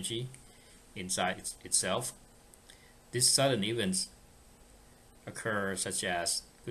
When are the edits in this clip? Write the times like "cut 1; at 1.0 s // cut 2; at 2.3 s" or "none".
cut 1; at 4.8 s